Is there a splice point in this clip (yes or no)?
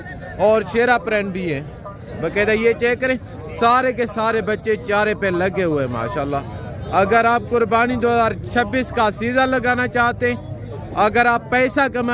no